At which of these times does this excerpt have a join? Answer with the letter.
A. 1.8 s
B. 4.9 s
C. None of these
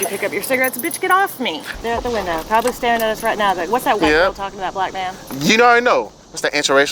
A